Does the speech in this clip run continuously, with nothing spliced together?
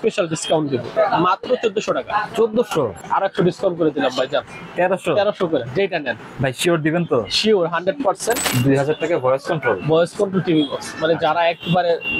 no; 3 cuts; at 0.9 s, 3.0 s, 8.4 s

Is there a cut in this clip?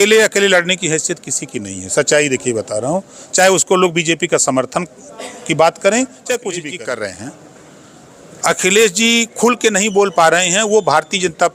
yes; 1 cut; at 6.6 s

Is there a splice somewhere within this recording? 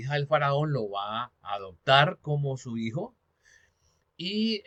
no; 0 cuts

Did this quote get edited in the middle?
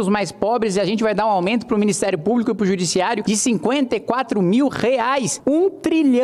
yes; 2 cuts; at 3.2 s, 5.3 s

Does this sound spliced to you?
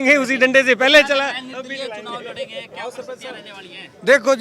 no; 0 cuts

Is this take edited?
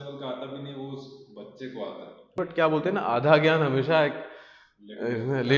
yes; 1 cut; at 2.4 s

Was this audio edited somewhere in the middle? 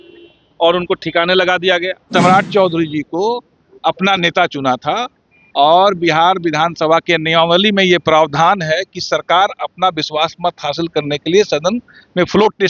yes; 1 cut; at 2.1 s

